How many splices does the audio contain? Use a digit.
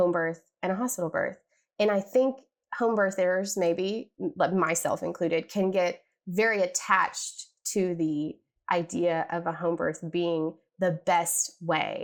0